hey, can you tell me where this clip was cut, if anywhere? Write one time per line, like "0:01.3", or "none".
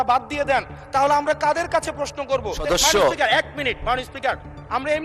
0:02.6